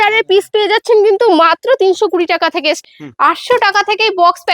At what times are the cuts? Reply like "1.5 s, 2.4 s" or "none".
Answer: 2.8 s